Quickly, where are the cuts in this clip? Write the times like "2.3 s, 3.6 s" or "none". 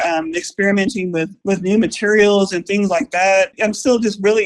1.3 s, 3.5 s